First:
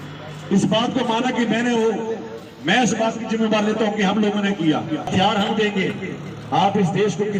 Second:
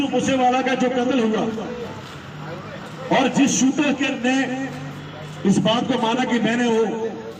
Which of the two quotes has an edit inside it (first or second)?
first